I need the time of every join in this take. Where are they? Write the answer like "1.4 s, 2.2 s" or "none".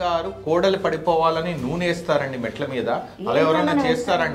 none